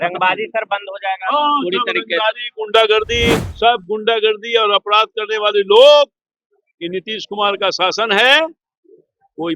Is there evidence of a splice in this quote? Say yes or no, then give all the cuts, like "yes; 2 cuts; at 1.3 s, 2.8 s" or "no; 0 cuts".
yes; 1 cut; at 3.5 s